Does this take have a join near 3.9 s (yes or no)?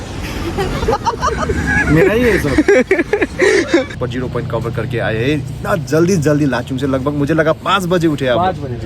yes